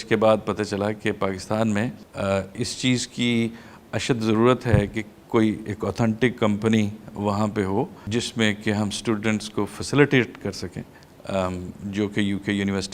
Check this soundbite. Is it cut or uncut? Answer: cut